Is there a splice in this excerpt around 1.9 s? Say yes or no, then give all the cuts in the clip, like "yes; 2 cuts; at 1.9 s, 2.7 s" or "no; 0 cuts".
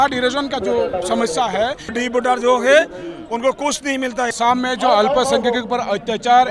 yes; 2 cuts; at 1.9 s, 4.3 s